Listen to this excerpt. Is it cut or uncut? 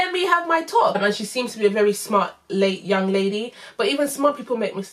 cut